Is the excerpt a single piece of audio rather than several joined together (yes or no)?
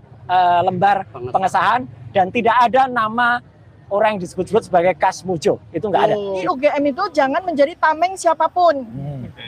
no